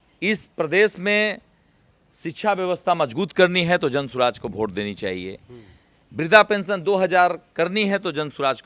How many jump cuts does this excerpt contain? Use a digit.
0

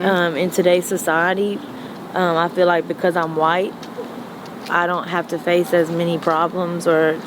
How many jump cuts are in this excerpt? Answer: 0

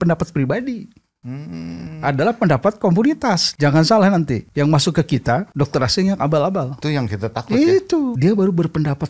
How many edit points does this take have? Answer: 5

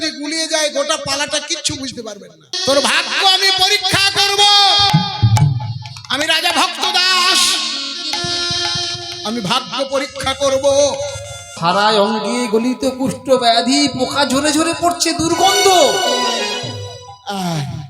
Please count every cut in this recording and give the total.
2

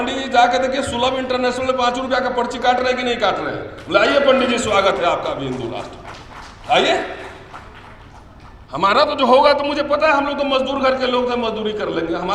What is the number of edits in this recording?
0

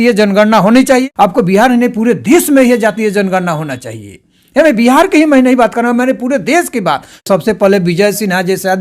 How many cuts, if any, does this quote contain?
2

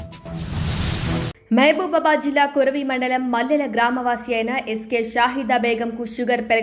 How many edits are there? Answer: 1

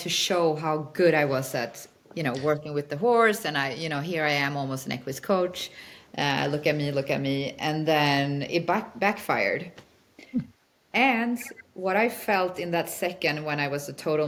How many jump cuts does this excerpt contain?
0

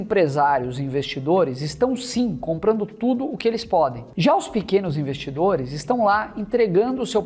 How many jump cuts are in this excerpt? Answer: 1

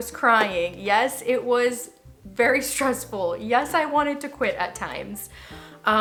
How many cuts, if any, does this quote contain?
0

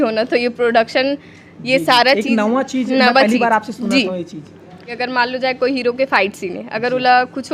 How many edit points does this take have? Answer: 1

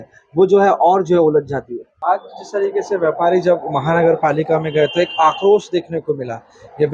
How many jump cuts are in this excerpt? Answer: 1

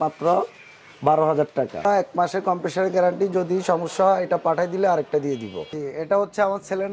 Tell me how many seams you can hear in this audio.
2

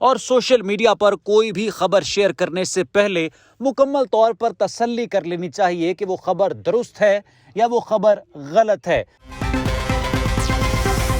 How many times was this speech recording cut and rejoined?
1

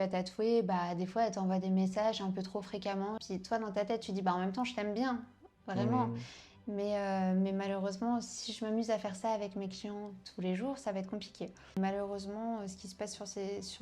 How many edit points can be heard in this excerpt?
2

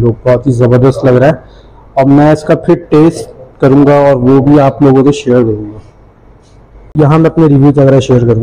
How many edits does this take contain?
1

